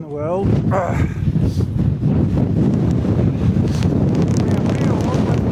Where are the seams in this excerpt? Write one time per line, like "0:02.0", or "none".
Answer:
none